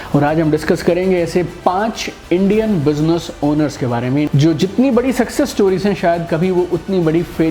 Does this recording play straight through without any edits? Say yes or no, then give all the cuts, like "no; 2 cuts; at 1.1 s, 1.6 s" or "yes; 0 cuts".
no; 1 cut; at 4.3 s